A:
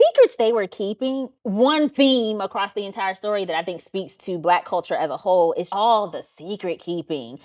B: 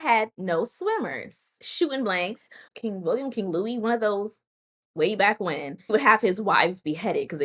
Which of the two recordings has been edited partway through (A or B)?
B